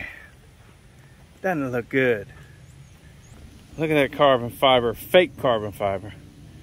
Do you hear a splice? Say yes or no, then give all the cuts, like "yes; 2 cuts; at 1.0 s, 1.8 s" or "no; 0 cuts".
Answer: yes; 1 cut; at 3.5 s